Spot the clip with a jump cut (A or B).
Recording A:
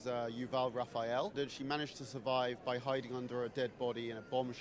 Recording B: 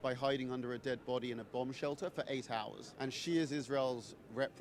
A